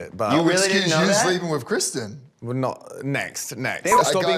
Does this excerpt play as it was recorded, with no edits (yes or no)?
yes